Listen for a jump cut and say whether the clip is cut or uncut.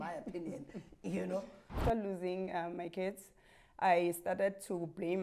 cut